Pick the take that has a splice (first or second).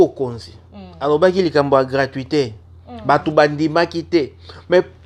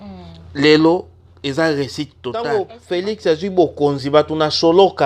second